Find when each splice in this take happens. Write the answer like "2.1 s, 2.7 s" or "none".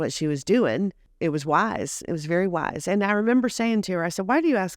1.1 s